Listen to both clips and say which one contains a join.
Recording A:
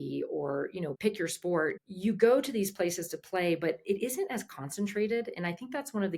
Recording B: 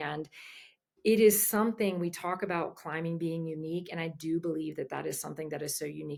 A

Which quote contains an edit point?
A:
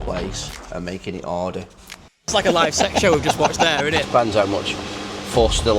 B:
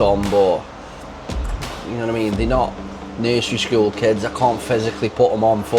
A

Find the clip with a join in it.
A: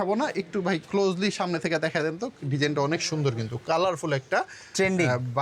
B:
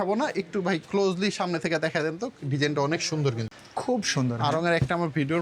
B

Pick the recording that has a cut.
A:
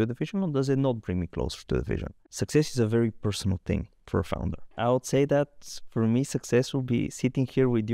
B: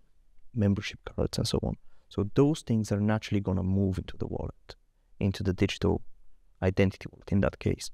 A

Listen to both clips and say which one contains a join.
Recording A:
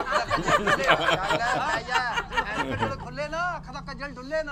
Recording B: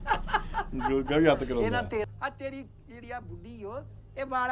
B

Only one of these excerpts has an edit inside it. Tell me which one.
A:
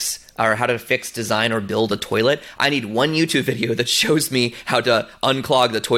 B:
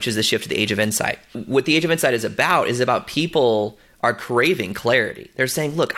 B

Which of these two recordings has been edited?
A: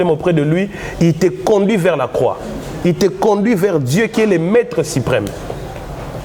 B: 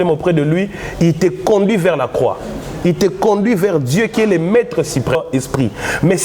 B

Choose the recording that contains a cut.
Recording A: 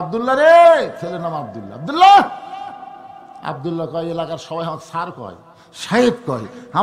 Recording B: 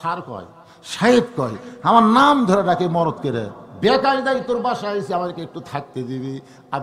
B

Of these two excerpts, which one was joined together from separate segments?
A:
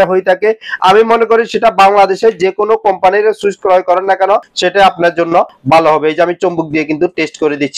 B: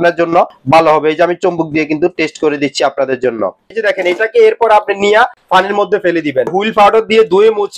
B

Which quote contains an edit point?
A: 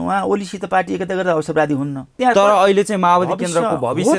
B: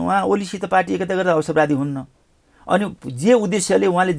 A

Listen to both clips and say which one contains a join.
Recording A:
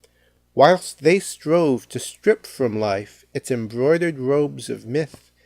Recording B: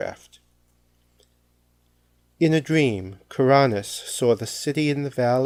A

